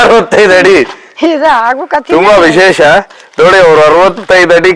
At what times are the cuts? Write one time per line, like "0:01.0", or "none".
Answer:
none